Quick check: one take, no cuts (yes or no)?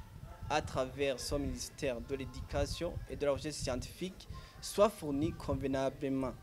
yes